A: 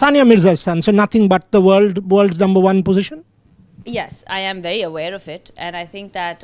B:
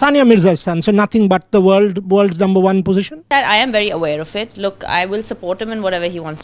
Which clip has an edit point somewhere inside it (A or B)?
B